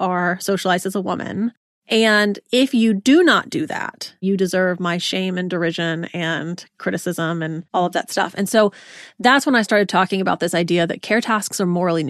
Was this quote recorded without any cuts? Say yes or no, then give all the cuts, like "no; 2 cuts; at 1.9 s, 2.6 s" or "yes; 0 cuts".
no; 3 cuts; at 2.1 s, 4.2 s, 7.6 s